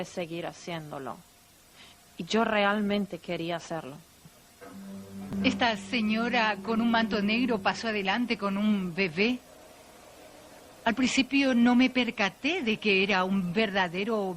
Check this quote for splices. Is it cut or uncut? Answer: cut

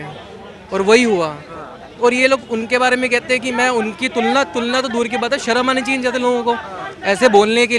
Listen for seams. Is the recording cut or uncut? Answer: uncut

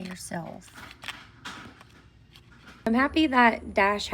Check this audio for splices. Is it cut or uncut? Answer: cut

